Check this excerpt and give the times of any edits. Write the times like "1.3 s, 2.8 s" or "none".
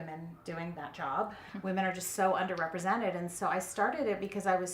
1.4 s

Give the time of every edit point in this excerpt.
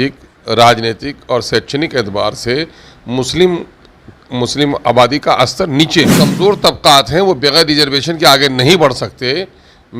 6.1 s

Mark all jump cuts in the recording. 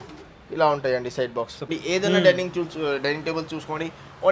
1.7 s

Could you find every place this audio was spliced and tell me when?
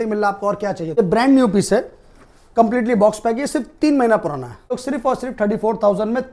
1.0 s, 4.7 s

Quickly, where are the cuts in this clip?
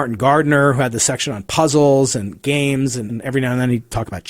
3.1 s

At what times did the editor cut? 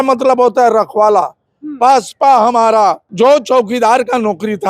3.0 s

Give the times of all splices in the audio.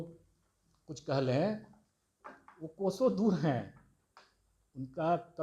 none

